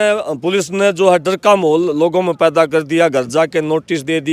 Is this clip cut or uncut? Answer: uncut